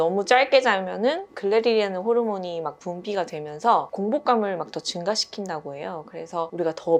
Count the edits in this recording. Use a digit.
0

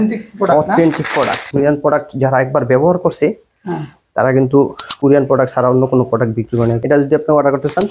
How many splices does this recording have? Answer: 2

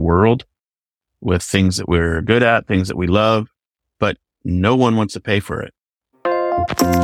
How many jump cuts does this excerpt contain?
1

